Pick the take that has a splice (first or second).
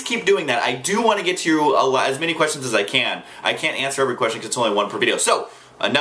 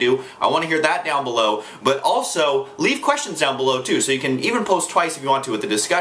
second